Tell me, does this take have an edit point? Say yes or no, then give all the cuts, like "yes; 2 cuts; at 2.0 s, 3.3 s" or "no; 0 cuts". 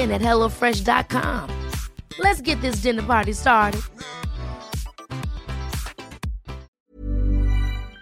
yes; 1 cut; at 6.7 s